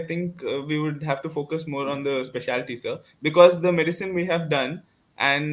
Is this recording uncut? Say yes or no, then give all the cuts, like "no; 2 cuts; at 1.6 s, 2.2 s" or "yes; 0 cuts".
yes; 0 cuts